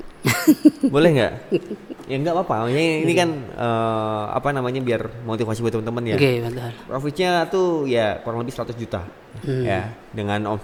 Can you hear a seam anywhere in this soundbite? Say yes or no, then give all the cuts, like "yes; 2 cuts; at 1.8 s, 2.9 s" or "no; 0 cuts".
no; 0 cuts